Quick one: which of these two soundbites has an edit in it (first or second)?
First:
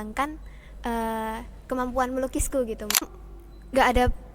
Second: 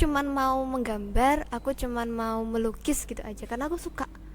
first